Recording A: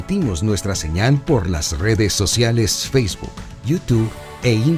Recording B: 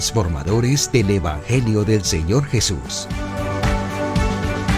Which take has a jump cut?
B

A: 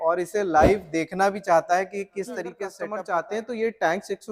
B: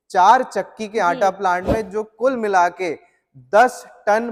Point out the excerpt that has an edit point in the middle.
A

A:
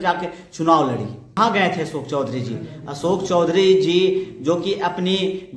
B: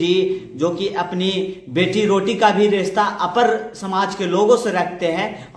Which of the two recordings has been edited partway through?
A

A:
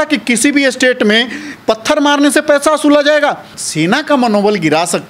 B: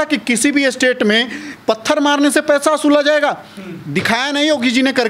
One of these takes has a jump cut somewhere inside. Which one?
A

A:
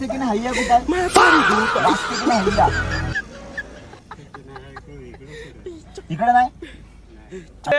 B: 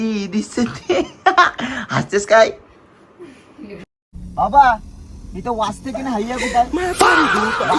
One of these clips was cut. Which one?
B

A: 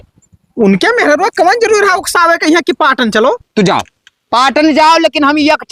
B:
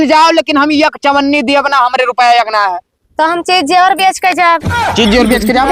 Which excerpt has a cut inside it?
A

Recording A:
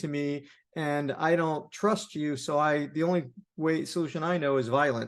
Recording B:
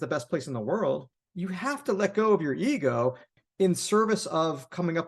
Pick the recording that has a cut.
B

